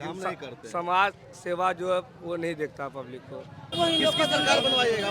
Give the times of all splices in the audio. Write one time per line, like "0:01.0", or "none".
0:03.7